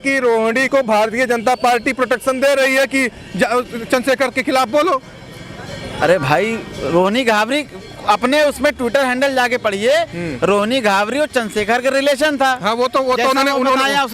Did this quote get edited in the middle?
no; 0 cuts

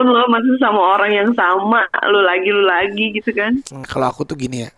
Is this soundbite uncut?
no; 1 cut; at 3.7 s

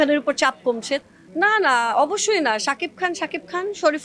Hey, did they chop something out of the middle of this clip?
yes; 1 cut; at 1.0 s

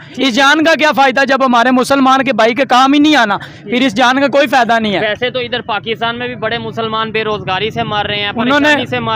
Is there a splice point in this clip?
no; 0 cuts

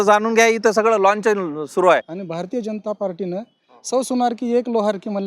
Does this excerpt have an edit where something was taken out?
yes; 1 cut; at 2.1 s

